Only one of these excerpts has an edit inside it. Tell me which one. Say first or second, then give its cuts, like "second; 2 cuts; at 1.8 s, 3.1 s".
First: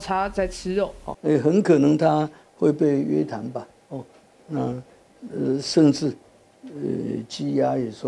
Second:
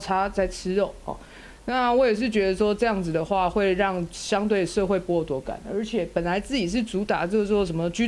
first; 1 cut; at 1.1 s